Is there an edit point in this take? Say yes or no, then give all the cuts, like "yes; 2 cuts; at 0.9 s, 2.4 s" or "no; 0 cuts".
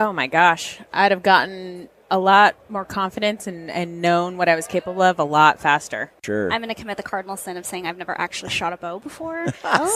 yes; 1 cut; at 6.2 s